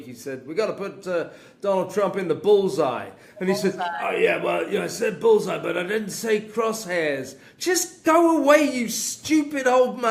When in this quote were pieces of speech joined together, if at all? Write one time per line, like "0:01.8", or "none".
none